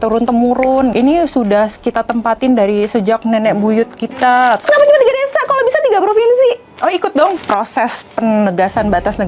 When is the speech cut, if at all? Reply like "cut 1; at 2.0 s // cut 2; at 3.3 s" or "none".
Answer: cut 1; at 0.9 s // cut 2; at 4.7 s // cut 3; at 7.4 s